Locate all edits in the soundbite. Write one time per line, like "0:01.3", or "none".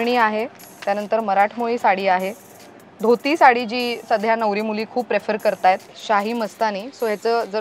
0:05.9

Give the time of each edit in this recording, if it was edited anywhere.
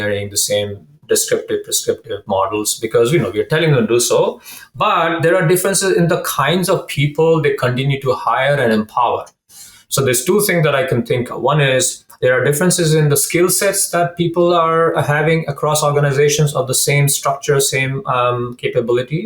none

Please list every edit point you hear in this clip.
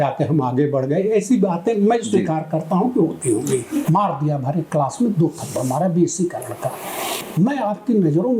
0:03.8
0:07.2

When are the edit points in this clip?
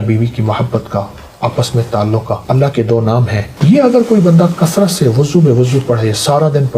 0:02.4
0:03.5

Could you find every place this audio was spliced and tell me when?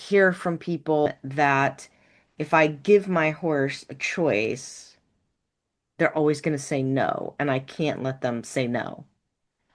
0:01.2

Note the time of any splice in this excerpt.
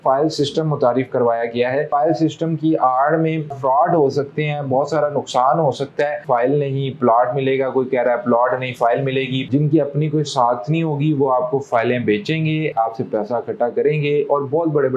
0:01.9
0:03.6
0:06.2
0:09.4

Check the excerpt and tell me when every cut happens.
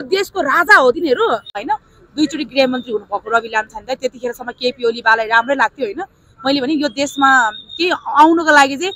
0:01.6

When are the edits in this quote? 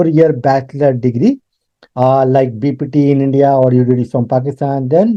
none

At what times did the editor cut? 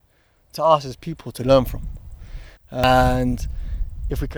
0:02.8

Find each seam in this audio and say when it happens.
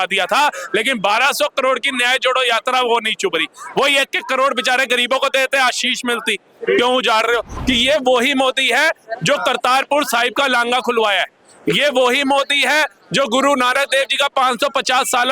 0:07.5

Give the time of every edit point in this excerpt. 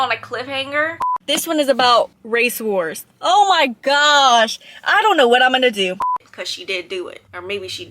0:01.1
0:06.0

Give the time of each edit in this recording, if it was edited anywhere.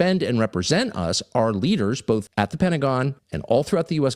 none

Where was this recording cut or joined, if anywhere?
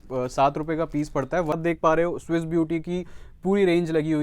0:01.6

